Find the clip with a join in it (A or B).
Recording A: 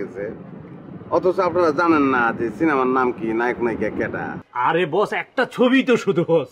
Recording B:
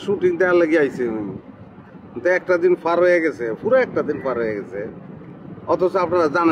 A